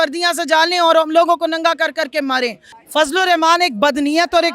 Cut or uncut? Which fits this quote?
cut